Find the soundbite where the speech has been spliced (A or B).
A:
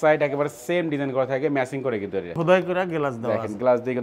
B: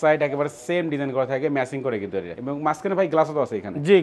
A